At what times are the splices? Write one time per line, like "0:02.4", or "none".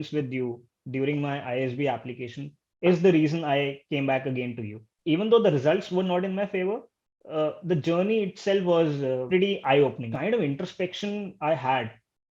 0:04.9
0:09.2
0:10.1